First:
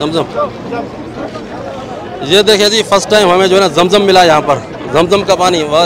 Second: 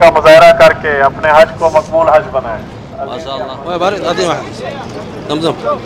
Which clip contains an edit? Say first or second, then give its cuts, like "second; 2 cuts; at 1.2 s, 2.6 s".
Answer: second; 1 cut; at 3.2 s